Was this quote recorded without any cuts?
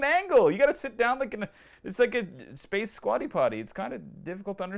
yes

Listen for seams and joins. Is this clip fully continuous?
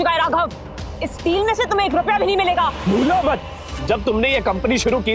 yes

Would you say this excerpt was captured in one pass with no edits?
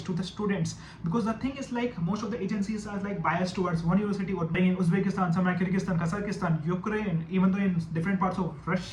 no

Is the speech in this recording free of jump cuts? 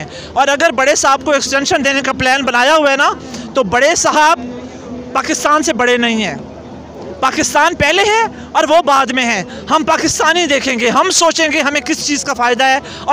yes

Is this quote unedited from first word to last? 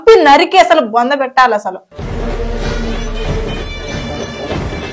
yes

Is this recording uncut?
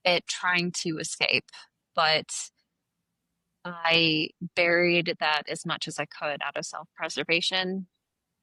yes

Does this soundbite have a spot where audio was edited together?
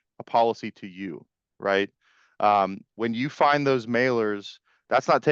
no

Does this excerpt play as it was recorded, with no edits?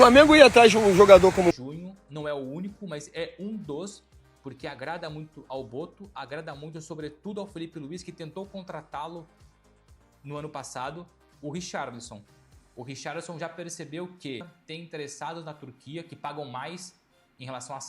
no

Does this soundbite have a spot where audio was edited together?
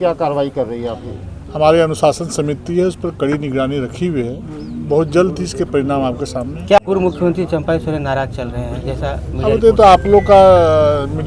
yes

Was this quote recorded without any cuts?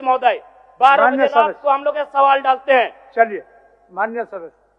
yes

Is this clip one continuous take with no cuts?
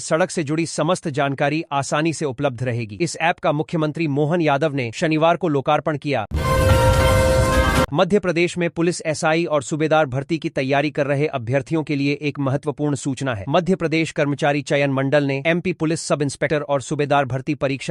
yes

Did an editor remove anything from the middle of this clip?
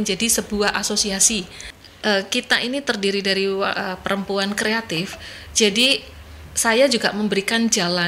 yes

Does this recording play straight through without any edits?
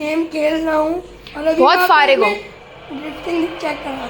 yes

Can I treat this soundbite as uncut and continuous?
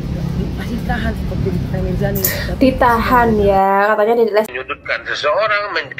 no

